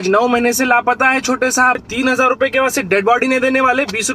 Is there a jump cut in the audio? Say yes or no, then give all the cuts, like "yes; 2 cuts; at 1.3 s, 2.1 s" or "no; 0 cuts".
yes; 1 cut; at 1.9 s